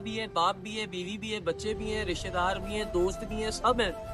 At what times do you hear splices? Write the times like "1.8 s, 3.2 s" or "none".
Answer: none